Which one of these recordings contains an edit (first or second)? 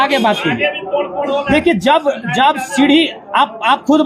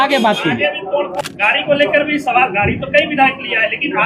second